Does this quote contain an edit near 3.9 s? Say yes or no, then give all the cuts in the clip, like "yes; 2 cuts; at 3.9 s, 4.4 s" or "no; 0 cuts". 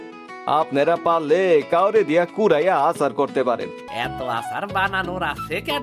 yes; 1 cut; at 3.9 s